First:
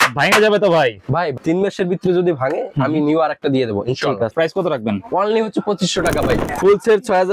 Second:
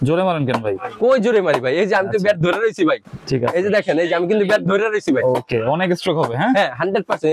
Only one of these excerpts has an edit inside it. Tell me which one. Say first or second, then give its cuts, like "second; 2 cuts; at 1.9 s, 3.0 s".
first; 3 cuts; at 1.3 s, 4.3 s, 6.5 s